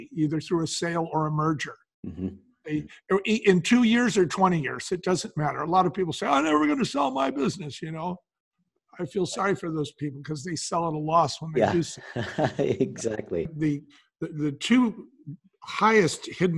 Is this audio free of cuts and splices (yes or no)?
no